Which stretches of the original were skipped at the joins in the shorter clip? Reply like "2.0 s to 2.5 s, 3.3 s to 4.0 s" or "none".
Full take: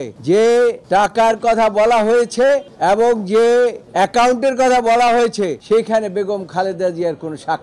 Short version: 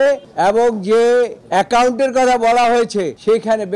none